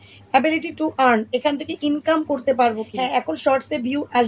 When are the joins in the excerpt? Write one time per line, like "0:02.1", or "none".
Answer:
0:02.9